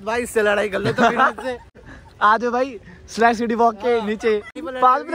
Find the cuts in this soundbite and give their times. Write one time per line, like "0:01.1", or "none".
none